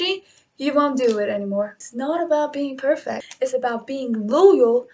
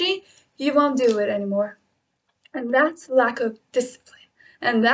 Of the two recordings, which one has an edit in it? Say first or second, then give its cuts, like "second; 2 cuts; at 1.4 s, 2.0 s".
first; 2 cuts; at 1.8 s, 3.3 s